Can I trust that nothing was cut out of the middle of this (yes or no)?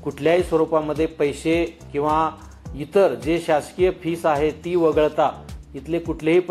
yes